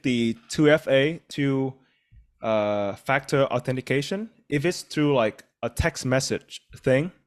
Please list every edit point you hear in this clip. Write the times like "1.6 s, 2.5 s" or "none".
1.2 s, 4.3 s